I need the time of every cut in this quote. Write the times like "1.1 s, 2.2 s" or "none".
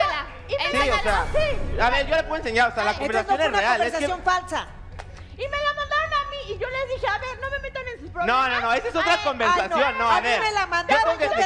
none